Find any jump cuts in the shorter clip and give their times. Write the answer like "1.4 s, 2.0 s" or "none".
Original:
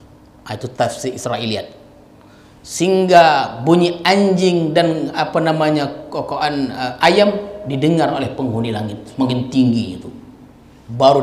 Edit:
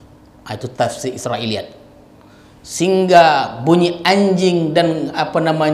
none